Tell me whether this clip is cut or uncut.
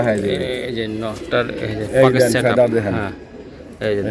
uncut